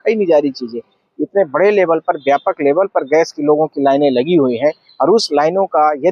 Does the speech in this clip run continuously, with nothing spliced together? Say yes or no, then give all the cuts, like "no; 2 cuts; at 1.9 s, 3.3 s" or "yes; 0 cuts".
yes; 0 cuts